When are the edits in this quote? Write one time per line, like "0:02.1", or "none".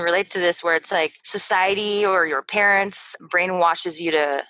0:01.3
0:03.1